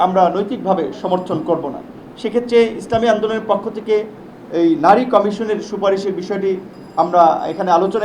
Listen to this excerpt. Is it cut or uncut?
uncut